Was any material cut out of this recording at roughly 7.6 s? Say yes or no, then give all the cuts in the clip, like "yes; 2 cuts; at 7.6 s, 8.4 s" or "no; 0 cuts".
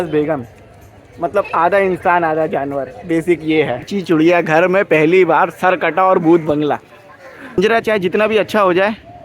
yes; 2 cuts; at 3.9 s, 7.6 s